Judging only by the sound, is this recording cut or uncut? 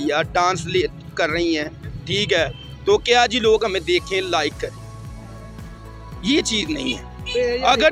uncut